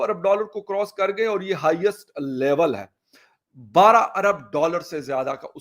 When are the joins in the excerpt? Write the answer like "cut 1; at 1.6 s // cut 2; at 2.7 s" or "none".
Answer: cut 1; at 3.2 s